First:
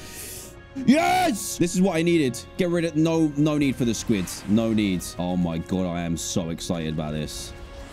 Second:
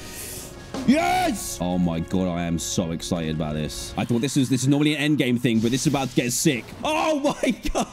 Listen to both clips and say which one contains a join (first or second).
second